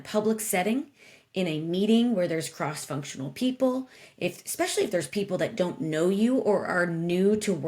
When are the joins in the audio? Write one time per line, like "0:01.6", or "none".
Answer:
none